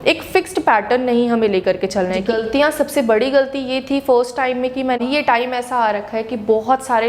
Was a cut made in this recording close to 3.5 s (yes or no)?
no